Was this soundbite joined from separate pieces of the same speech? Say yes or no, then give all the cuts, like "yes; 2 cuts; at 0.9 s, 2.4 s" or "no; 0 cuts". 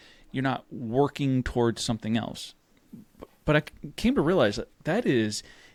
no; 0 cuts